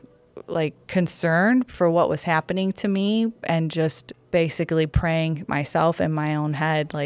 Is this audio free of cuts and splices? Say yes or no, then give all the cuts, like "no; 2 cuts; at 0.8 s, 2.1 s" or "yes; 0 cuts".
no; 1 cut; at 4.1 s